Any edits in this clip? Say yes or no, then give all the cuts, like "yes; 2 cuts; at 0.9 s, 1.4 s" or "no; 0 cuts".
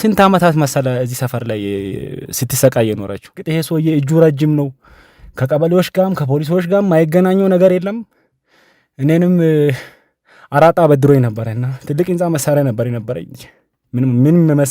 yes; 1 cut; at 3.5 s